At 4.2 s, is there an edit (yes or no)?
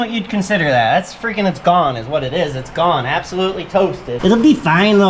yes